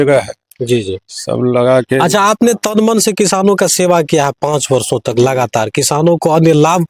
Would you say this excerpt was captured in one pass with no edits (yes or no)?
yes